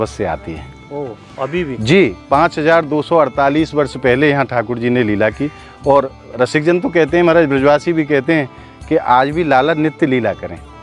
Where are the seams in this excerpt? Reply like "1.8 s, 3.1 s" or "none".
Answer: none